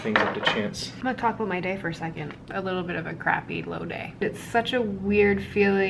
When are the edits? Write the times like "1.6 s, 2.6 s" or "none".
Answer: 0.9 s, 2.3 s, 4.2 s